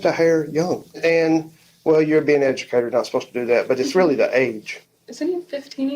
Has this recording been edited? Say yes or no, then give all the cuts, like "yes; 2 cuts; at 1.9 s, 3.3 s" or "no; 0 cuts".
yes; 2 cuts; at 1.0 s, 4.7 s